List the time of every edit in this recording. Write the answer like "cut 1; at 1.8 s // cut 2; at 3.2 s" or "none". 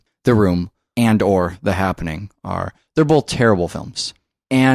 none